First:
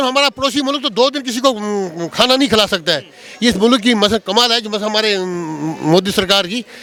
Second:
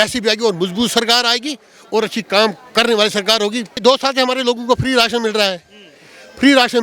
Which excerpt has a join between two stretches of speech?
second; 1 cut; at 3.8 s

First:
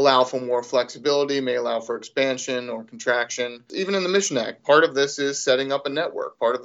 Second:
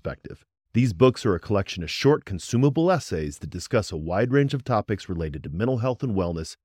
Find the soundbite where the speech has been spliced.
first; 2 cuts; at 3.7 s, 4.6 s

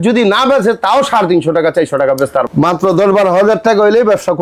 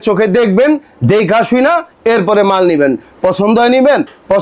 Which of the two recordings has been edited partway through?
first; 1 cut; at 2.5 s

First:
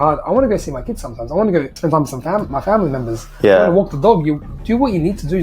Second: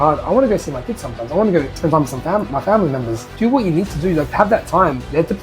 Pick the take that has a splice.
second; 2 cuts; at 3.2 s, 4.3 s

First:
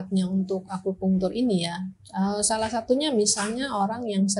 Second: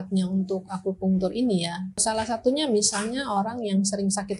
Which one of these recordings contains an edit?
second; 1 cut; at 2.0 s

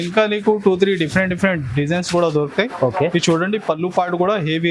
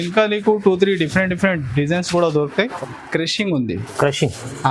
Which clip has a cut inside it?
second; 1 cut; at 2.7 s

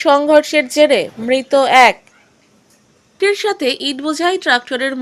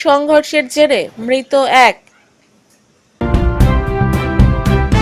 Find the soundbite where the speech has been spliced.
second; 1 cut; at 3.2 s

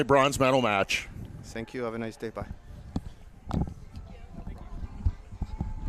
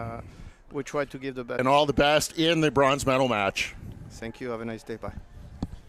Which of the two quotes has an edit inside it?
second; 1 cut; at 1.6 s

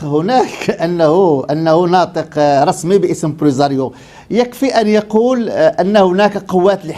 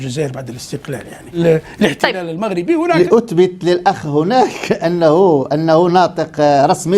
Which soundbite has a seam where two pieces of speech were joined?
second; 2 cuts; at 1.4 s, 3.0 s

